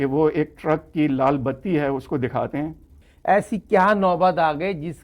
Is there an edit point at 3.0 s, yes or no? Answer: yes